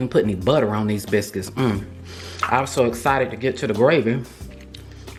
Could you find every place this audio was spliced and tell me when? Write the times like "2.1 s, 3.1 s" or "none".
none